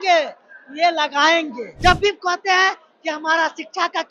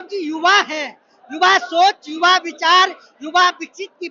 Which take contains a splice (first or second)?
first